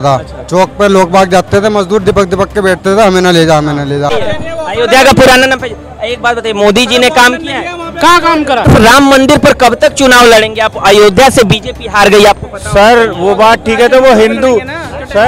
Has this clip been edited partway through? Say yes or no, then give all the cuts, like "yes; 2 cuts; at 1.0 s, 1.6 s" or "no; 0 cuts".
yes; 2 cuts; at 4.3 s, 8.7 s